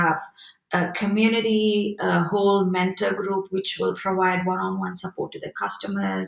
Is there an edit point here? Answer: no; 0 cuts

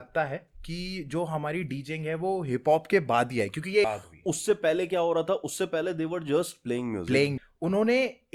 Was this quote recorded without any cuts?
no; 2 cuts; at 3.9 s, 7.3 s

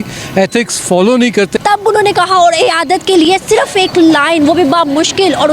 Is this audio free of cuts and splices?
no; 1 cut; at 1.5 s

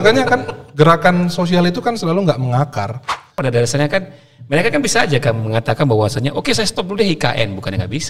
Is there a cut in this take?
yes; 1 cut; at 3.4 s

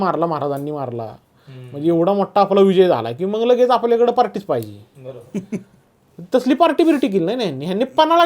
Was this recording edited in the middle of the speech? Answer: no; 0 cuts

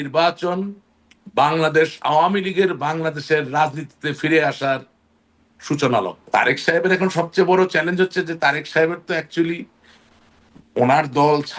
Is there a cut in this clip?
yes; 1 cut; at 6.2 s

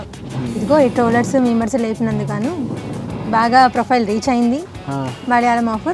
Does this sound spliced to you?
no; 0 cuts

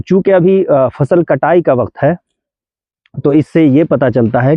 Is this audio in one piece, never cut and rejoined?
yes; 0 cuts

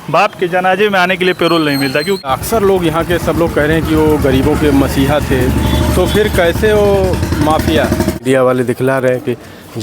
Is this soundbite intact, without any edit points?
no; 2 cuts; at 2.2 s, 8.2 s

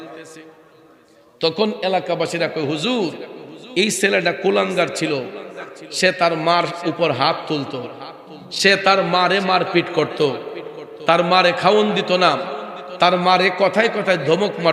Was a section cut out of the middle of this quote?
no; 0 cuts

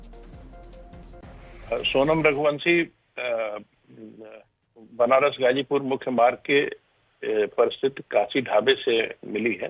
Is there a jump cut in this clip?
no; 0 cuts

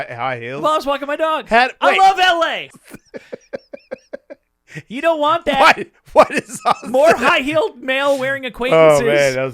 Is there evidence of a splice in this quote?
yes; 1 cut; at 2.7 s

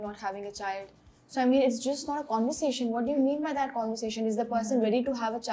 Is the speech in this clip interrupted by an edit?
no; 0 cuts

